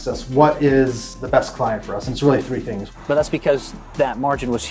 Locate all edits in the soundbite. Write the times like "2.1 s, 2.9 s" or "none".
2.8 s